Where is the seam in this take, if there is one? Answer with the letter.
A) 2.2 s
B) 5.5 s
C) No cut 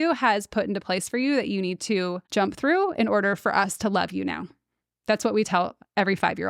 A